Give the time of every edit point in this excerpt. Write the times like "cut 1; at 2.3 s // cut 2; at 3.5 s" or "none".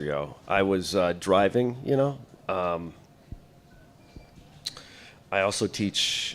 cut 1; at 2.5 s